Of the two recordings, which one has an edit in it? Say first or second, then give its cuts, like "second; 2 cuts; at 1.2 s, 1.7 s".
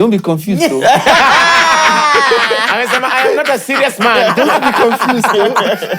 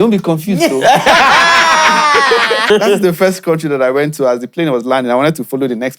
second; 1 cut; at 2.6 s